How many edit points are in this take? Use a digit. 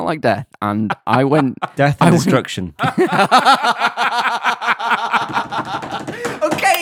1